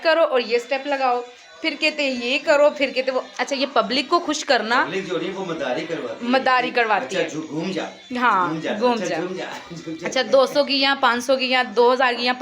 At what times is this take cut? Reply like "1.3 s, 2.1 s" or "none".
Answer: none

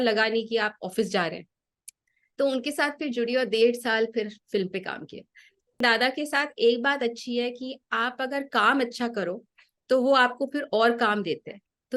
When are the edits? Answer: 5.8 s

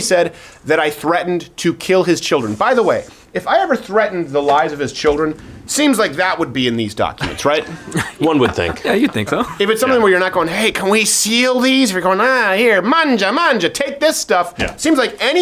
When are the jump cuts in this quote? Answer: none

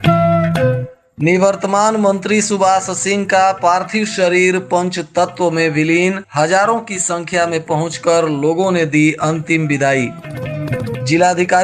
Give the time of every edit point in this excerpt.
1.0 s

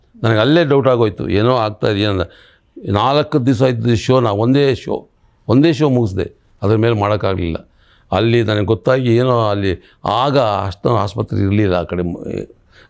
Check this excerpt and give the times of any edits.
none

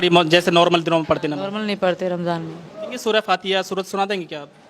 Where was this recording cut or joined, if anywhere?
2.9 s

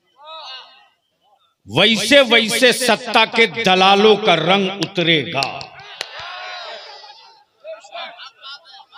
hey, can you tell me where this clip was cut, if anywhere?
none

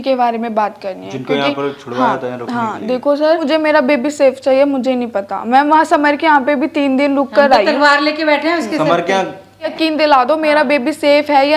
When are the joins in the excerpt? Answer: 3.3 s, 9.7 s

